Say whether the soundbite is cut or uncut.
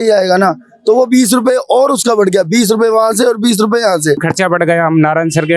cut